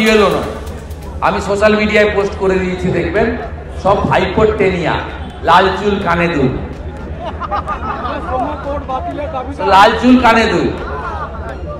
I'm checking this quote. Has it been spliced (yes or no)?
no